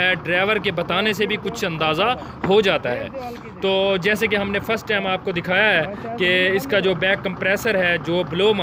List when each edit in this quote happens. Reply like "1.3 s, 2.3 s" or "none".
none